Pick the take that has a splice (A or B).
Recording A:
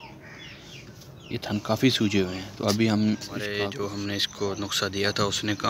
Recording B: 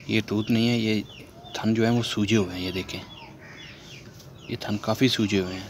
A